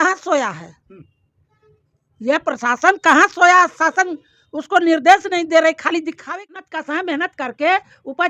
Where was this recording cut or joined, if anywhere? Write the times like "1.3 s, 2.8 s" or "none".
6.6 s